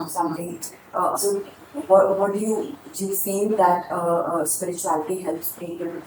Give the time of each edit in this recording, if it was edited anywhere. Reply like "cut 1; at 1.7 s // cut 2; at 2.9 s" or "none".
cut 1; at 1.2 s